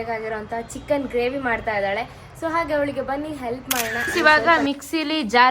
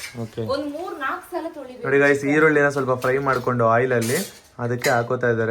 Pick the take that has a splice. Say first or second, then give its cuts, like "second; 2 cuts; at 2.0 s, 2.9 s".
first; 1 cut; at 4.0 s